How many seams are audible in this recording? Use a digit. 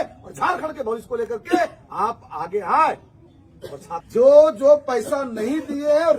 1